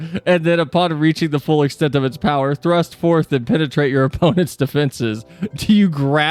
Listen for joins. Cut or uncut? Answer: uncut